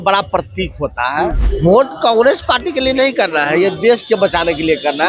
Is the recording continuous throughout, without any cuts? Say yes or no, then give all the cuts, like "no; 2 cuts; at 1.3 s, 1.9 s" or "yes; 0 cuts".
no; 1 cut; at 1.5 s